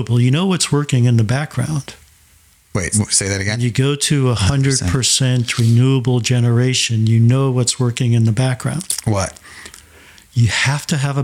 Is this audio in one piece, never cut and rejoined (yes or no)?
no